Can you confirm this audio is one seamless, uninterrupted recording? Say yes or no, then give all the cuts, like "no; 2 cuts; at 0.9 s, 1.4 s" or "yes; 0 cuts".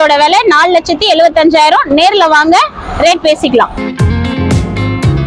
yes; 0 cuts